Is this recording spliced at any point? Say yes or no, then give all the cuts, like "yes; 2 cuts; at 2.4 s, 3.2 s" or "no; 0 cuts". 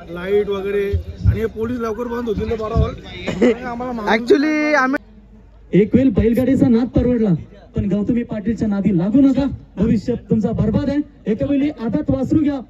yes; 1 cut; at 5.0 s